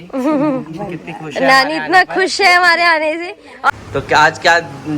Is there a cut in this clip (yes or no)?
yes